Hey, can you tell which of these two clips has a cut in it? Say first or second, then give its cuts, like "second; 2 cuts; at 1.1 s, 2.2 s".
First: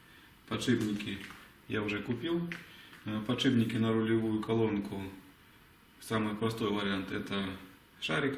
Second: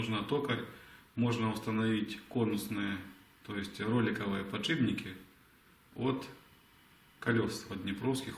second; 1 cut; at 4.4 s